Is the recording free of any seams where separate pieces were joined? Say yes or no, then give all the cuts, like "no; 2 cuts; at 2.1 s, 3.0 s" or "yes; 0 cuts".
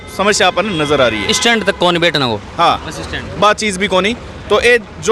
yes; 0 cuts